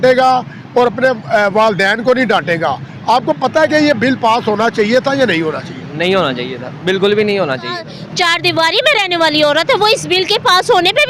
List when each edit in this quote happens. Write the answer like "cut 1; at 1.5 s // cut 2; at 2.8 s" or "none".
cut 1; at 7.9 s

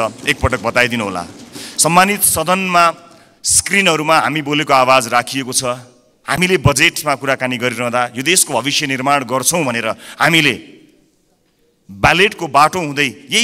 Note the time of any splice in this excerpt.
none

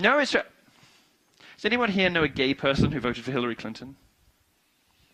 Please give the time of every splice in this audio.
none

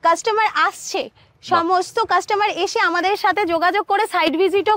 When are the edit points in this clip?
none

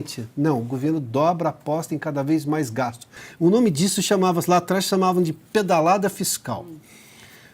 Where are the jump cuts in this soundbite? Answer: cut 1; at 3.2 s

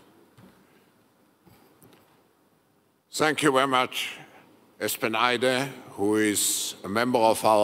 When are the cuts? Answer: none

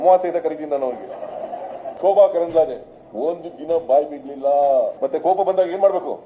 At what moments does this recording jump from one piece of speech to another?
cut 1; at 1.8 s // cut 2; at 4.9 s

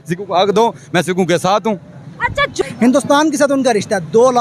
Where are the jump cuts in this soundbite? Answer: cut 1; at 2.6 s

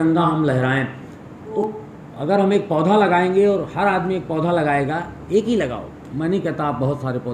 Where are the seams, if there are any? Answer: cut 1; at 1.6 s

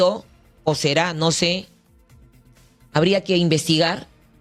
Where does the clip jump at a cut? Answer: none

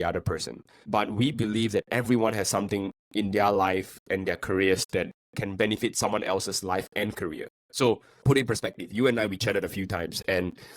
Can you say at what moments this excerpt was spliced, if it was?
none

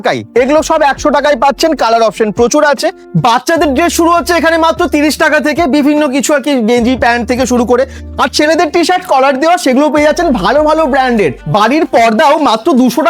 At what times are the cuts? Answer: cut 1; at 3.0 s // cut 2; at 8.0 s // cut 3; at 11.4 s

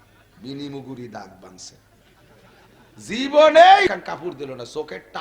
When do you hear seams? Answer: cut 1; at 3.9 s

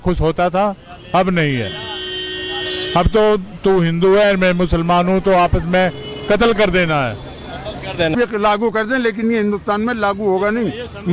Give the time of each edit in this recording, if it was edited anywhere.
cut 1; at 8.1 s

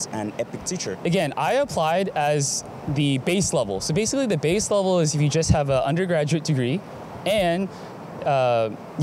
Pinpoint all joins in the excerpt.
none

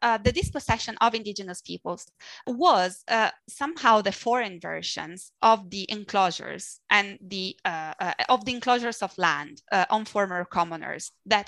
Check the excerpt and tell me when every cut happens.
cut 1; at 2.0 s

